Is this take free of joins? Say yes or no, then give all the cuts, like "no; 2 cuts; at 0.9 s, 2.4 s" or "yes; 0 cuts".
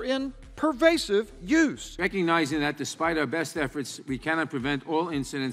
yes; 0 cuts